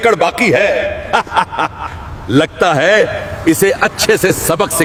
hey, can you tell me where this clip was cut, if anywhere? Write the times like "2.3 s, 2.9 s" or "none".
none